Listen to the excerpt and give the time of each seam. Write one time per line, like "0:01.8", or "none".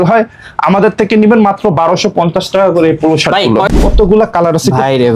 0:03.7